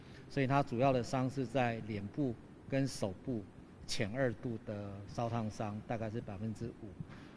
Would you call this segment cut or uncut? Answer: uncut